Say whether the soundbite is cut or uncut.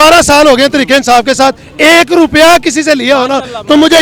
uncut